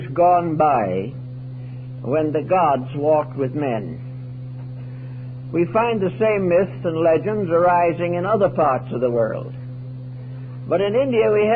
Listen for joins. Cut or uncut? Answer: cut